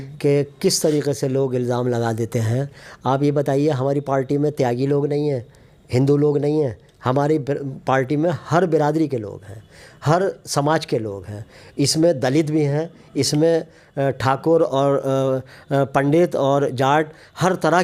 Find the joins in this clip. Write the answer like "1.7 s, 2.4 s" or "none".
none